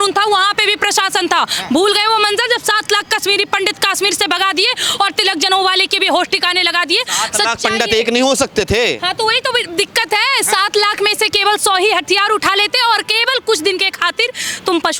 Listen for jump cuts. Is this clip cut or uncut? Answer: uncut